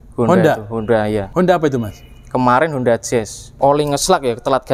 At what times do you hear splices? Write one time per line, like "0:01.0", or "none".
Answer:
0:01.3
0:03.4